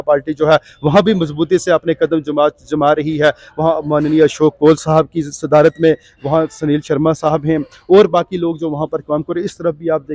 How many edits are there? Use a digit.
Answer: 0